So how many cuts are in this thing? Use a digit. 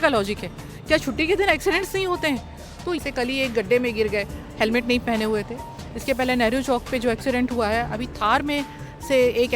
1